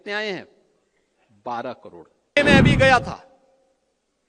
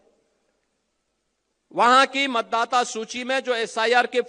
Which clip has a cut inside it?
first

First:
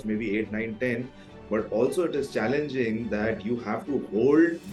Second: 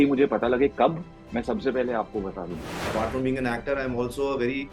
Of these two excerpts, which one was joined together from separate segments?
second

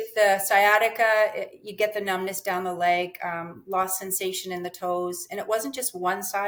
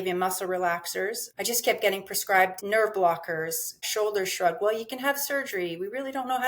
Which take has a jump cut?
second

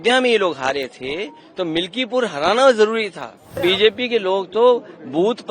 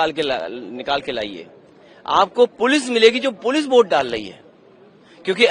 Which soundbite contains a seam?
first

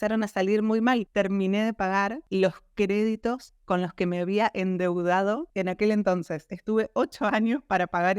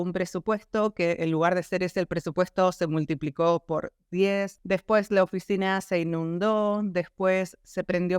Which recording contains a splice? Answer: first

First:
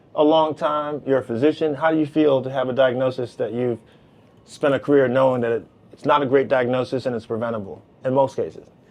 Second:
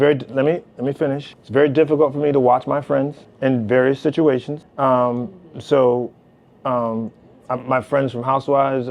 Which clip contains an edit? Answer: second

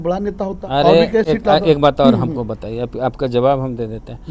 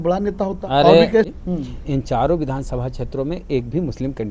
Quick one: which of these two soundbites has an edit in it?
second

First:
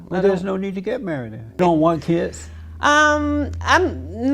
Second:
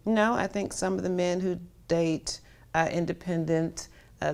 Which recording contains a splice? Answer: first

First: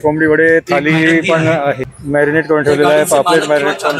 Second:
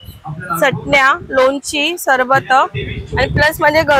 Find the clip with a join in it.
first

